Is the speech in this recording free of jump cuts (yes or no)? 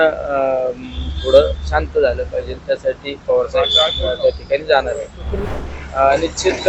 no